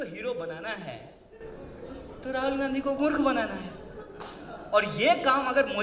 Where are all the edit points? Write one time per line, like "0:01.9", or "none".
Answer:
none